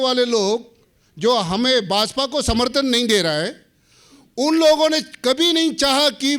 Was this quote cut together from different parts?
no; 0 cuts

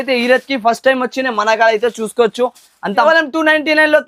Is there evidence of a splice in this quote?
yes; 1 cut; at 3.0 s

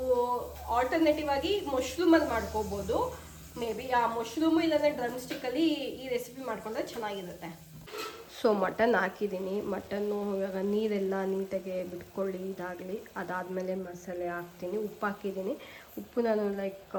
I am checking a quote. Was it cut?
no; 0 cuts

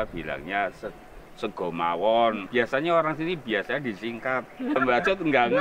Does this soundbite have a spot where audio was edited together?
yes; 2 cuts; at 2.4 s, 4.8 s

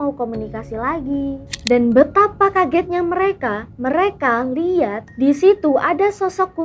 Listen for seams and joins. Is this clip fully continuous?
no; 1 cut; at 1.5 s

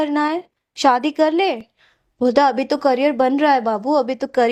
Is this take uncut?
yes; 0 cuts

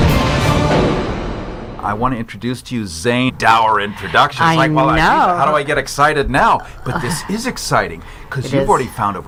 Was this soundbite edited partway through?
no; 0 cuts

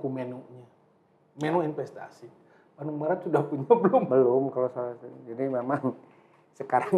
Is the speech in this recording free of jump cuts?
yes; 0 cuts

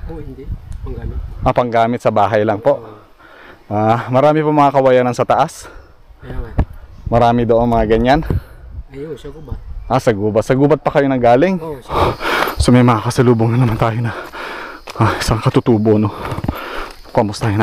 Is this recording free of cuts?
no; 1 cut; at 11.9 s

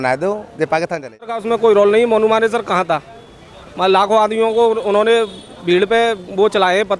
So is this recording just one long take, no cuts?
no; 1 cut; at 1.4 s

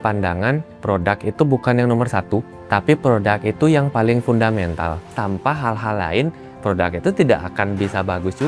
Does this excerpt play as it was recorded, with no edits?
no; 1 cut; at 5.1 s

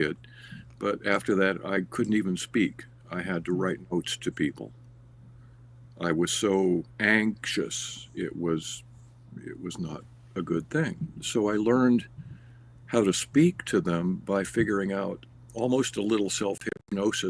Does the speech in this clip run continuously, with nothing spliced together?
yes; 0 cuts

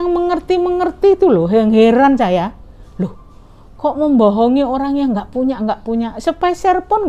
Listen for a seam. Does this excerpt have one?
no; 0 cuts

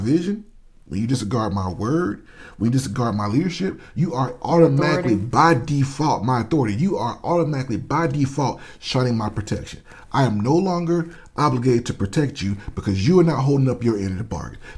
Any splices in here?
no; 0 cuts

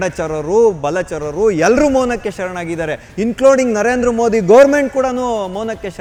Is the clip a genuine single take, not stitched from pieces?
yes; 0 cuts

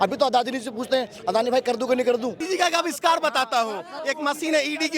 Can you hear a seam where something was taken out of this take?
yes; 1 cut; at 2.4 s

